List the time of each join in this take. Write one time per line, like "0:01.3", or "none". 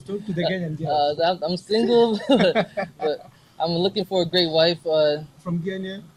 none

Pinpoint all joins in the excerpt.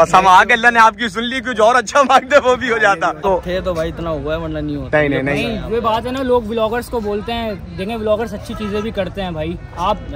0:03.2

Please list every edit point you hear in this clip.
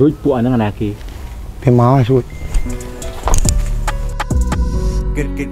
none

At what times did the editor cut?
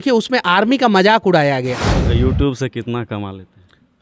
0:02.1

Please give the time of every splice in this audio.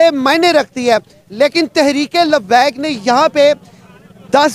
none

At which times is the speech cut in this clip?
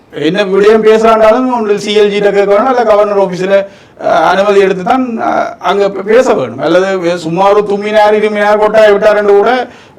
none

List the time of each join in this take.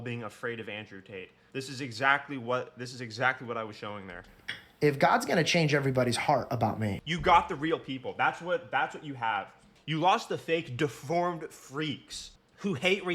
0:01.4
0:07.0

